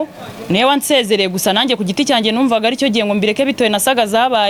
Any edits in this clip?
no; 0 cuts

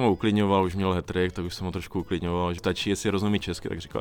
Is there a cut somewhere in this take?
yes; 1 cut; at 2.6 s

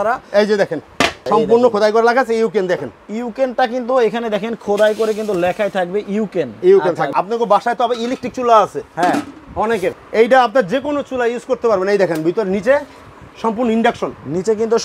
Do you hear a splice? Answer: yes; 3 cuts; at 1.2 s, 7.1 s, 10.0 s

